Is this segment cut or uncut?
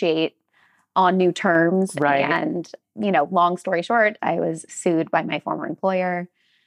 cut